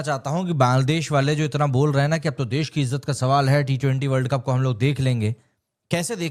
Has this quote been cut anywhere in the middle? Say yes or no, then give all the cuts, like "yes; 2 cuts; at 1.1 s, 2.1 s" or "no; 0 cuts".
no; 0 cuts